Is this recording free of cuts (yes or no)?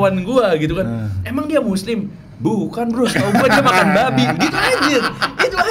yes